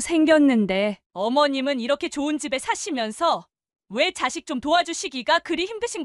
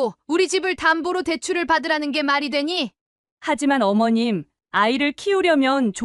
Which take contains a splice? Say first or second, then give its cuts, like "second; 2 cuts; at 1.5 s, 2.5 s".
first; 1 cut; at 1.0 s